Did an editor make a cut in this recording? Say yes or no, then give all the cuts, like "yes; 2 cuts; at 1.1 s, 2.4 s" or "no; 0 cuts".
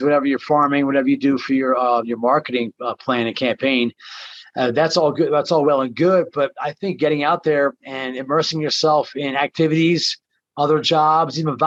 no; 0 cuts